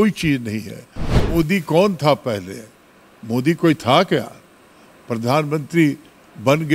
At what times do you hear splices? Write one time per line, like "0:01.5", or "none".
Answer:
0:01.1